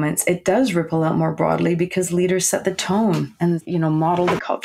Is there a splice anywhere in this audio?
yes; 1 cut; at 3.6 s

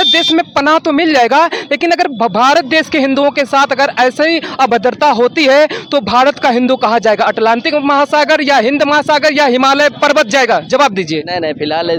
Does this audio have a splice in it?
no; 0 cuts

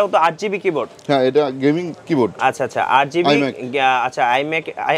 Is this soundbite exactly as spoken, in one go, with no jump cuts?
yes; 0 cuts

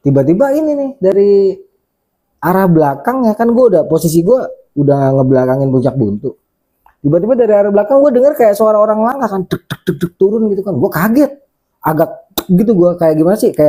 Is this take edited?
no; 0 cuts

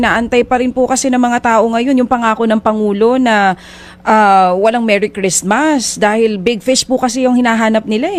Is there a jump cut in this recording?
no; 0 cuts

